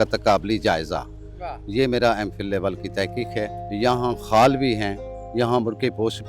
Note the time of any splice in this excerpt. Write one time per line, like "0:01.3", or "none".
0:03.6